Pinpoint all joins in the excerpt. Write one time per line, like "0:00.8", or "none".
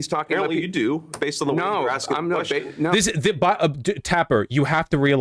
none